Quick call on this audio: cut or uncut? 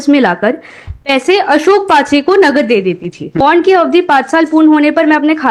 cut